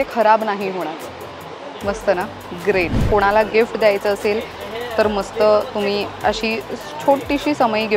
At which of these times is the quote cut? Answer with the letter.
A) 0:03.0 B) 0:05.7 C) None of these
A